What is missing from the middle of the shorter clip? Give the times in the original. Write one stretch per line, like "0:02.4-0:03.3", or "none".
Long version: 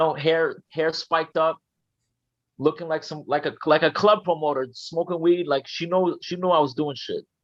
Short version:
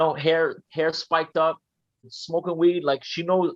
0:02.2-0:04.8